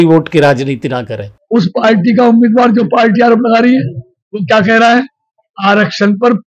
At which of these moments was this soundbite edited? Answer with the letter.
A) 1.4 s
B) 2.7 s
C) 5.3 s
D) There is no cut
A